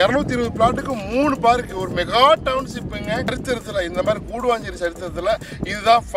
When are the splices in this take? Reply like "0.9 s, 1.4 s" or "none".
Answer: 3.3 s